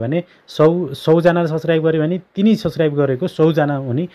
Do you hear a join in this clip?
no; 0 cuts

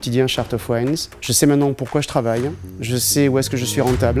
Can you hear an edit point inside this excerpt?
no; 0 cuts

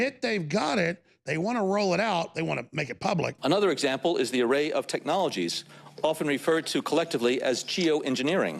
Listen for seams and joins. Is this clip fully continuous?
no; 1 cut; at 3.4 s

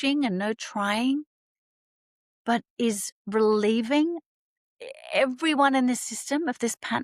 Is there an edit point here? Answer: no; 0 cuts

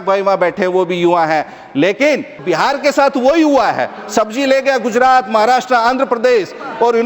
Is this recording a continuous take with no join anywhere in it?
no; 1 cut; at 2.4 s

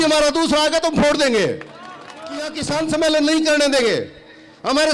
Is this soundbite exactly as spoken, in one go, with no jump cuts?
no; 1 cut; at 2.5 s

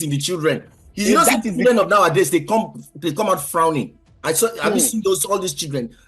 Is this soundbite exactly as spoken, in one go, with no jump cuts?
yes; 0 cuts

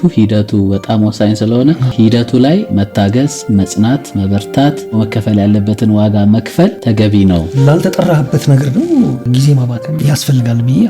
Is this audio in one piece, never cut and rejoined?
no; 5 cuts; at 1.9 s, 3.2 s, 6.8 s, 7.5 s, 9.4 s

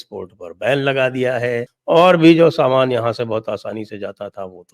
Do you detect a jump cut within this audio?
yes; 1 cut; at 1.7 s

